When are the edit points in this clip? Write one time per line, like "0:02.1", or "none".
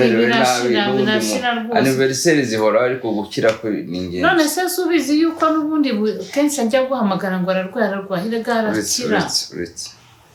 none

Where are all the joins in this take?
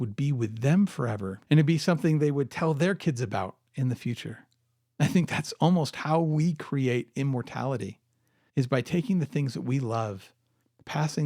0:01.3

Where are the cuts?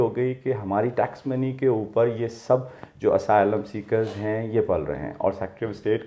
none

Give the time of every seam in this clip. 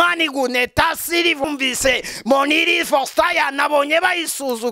0:01.4

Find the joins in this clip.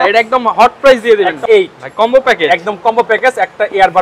0:01.4

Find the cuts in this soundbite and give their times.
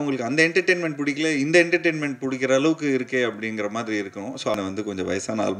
0:04.5

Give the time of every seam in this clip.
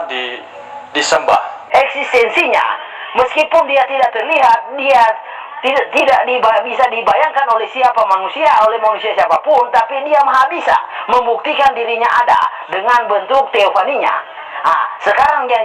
0:01.6

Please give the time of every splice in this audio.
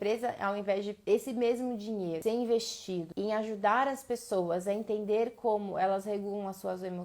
0:00.9
0:02.2
0:03.1

